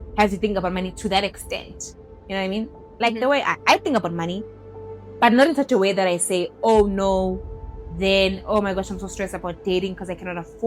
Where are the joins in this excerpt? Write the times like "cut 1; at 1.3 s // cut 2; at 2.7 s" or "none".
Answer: none